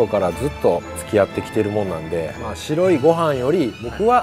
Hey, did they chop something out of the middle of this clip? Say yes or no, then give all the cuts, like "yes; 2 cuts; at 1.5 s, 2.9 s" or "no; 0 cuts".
yes; 2 cuts; at 0.9 s, 2.3 s